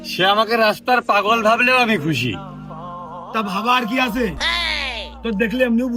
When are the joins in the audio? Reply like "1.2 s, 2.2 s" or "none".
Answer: none